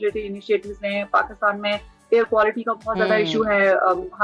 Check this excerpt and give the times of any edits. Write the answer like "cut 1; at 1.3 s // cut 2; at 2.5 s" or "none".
none